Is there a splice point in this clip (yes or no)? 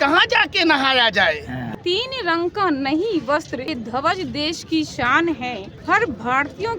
yes